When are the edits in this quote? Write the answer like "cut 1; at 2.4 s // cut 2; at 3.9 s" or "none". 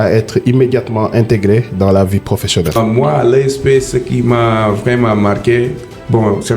cut 1; at 2.8 s